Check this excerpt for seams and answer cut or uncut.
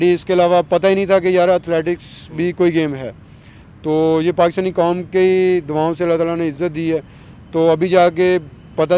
uncut